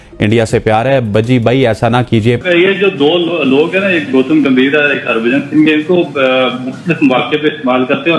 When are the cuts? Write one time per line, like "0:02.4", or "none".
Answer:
0:02.4

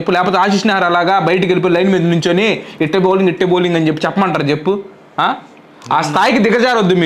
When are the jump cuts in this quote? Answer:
none

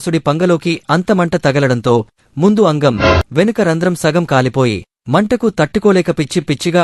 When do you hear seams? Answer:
none

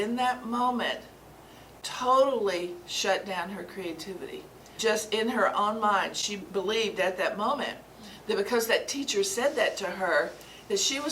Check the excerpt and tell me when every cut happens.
0:04.7
0:06.4

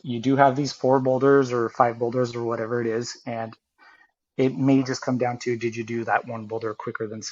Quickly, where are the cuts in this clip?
none

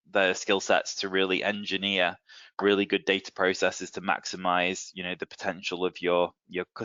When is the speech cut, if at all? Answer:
none

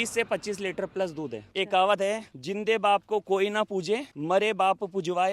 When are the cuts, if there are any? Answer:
0:01.4

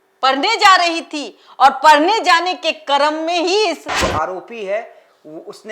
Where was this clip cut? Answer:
0:03.9

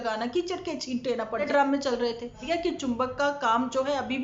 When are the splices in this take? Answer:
0:01.5
0:02.4

